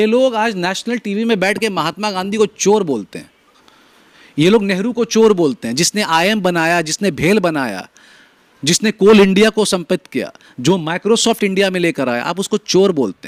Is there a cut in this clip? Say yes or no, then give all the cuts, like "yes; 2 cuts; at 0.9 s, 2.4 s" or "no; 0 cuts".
no; 0 cuts